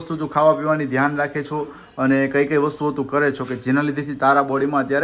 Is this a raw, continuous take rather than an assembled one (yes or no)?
yes